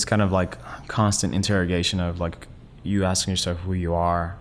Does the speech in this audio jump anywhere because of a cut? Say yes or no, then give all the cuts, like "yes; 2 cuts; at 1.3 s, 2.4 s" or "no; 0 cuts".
no; 0 cuts